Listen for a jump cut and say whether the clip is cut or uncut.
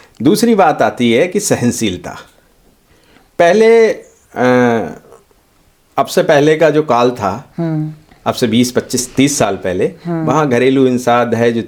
uncut